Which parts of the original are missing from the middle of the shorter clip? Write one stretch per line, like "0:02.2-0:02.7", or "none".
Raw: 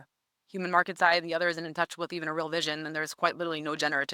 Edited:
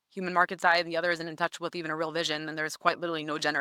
none